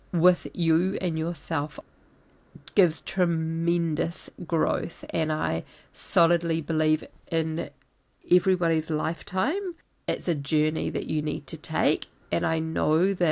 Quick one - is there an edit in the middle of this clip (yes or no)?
yes